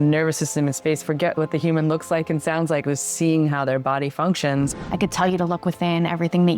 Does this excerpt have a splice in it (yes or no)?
yes